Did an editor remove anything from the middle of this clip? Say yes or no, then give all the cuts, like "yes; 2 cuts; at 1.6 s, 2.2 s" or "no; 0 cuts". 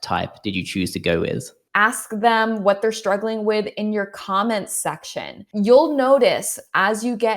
yes; 2 cuts; at 1.6 s, 5.4 s